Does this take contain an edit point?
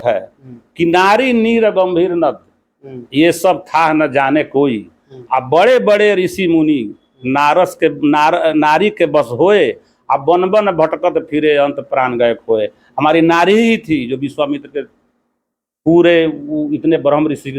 no; 0 cuts

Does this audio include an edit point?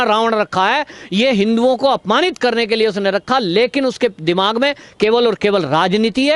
no; 0 cuts

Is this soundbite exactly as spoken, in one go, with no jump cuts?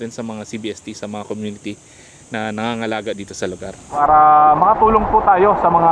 no; 1 cut; at 3.9 s

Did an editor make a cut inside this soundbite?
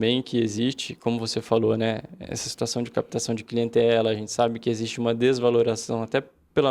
no; 0 cuts

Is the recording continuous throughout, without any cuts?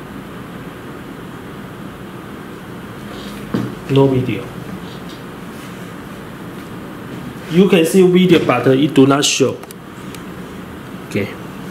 yes; 0 cuts

